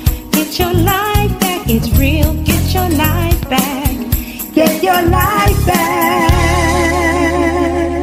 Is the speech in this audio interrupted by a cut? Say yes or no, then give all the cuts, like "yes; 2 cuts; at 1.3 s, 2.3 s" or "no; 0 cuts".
no; 0 cuts